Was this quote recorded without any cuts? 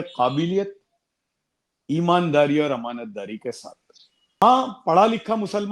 no; 1 cut; at 4.4 s

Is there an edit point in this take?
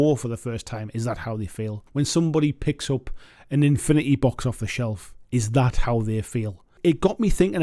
yes; 2 cuts; at 1.8 s, 6.8 s

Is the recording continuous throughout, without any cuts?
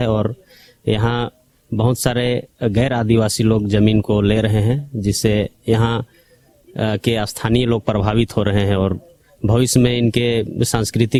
yes; 0 cuts

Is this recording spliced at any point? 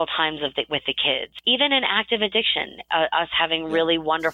yes; 1 cut; at 1.3 s

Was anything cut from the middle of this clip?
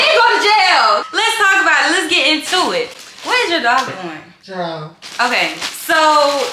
no; 0 cuts

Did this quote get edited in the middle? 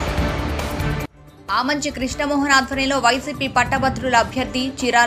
yes; 1 cut; at 0.9 s

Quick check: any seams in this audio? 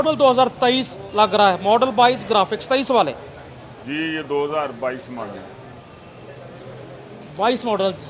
no; 0 cuts

